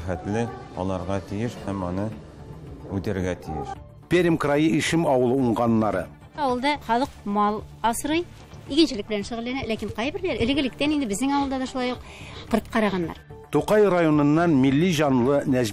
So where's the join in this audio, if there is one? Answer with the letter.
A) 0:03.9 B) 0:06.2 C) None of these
A